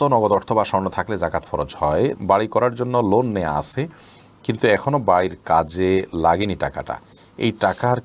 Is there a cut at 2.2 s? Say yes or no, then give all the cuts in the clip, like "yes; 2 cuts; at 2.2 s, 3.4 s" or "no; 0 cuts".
yes; 1 cut; at 2.2 s